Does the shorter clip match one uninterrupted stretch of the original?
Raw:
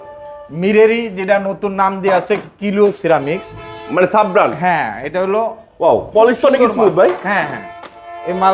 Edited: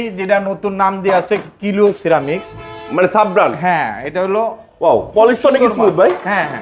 yes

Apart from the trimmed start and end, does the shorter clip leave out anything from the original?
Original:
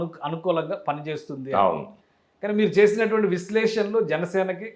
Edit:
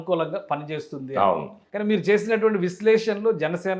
yes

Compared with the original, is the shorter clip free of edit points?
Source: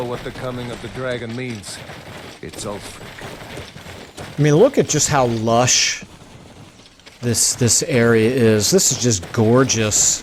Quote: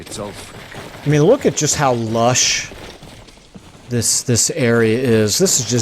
no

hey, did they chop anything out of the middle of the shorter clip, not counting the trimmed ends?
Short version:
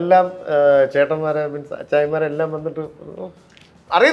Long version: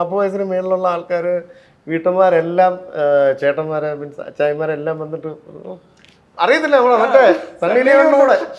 no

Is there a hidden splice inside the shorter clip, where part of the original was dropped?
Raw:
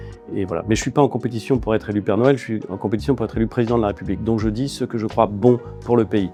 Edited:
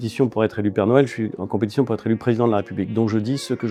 no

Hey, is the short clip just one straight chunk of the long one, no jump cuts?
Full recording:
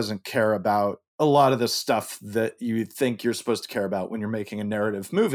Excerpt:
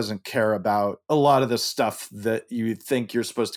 no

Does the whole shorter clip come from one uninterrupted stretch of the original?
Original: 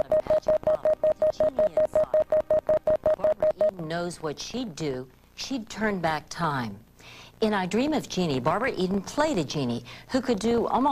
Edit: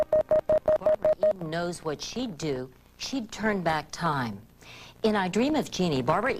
no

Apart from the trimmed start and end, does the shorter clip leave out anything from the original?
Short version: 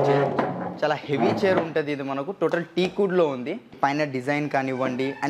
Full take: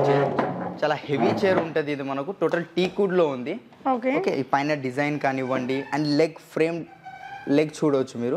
yes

